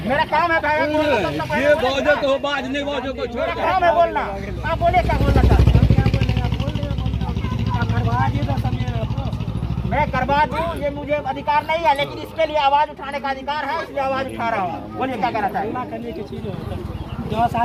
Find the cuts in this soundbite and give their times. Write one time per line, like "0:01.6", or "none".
none

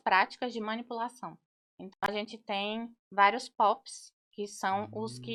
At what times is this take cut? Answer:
none

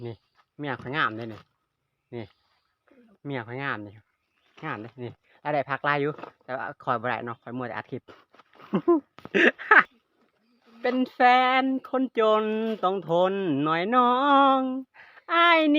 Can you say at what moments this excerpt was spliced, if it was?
0:09.9

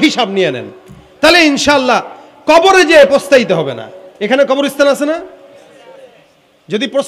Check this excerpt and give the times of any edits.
none

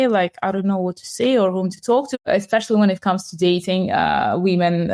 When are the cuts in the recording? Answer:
0:02.2

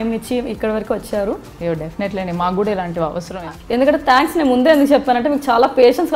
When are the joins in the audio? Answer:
0:03.4

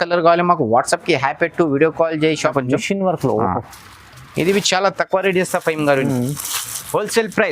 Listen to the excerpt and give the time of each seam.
0:02.5

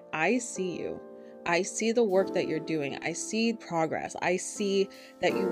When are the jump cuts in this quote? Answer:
0:03.5

